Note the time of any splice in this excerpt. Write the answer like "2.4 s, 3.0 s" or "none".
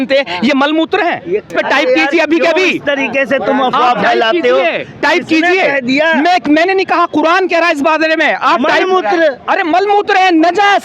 1.5 s